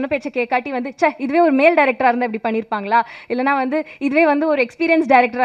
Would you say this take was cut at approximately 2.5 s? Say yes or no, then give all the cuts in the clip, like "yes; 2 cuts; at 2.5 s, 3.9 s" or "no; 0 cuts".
no; 0 cuts